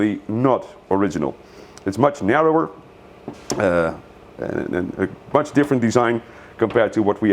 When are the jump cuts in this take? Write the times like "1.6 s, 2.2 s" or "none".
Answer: none